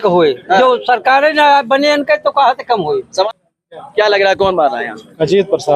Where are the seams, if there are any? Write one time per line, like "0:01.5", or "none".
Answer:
0:03.3